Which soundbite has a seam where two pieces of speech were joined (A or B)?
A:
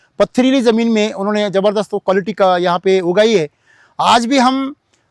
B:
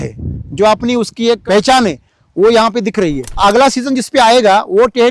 B